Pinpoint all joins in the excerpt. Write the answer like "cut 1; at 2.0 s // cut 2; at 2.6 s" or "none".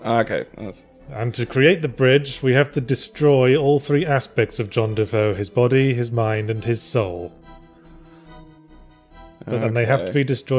none